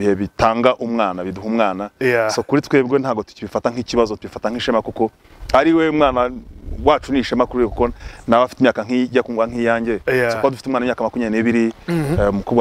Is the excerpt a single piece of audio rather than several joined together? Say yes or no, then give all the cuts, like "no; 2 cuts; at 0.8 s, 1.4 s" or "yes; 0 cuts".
yes; 0 cuts